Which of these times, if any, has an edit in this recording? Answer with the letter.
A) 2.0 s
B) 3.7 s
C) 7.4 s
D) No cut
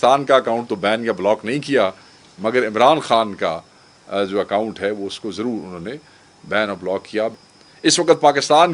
C